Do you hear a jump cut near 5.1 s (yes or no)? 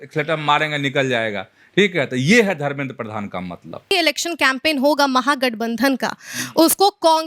no